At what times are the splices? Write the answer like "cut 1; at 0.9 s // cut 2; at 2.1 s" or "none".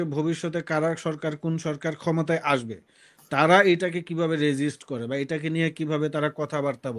none